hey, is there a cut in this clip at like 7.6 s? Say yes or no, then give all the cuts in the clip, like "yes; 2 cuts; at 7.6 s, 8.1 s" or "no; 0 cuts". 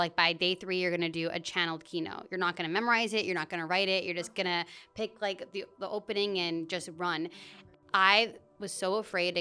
yes; 1 cut; at 7.6 s